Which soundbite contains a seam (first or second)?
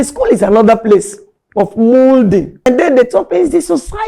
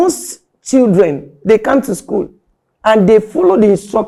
first